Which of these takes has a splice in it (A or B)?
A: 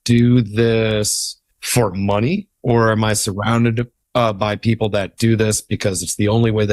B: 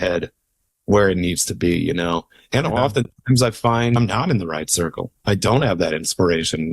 B